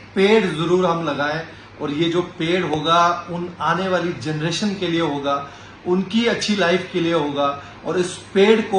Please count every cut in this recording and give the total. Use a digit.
0